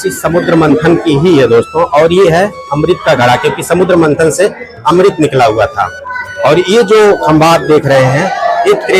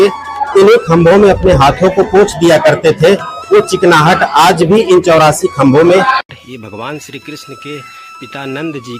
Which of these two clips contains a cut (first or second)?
second